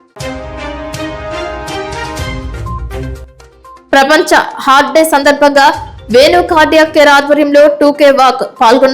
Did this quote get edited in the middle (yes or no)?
yes